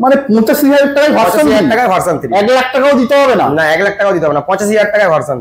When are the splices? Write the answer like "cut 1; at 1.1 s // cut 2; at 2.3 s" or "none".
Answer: none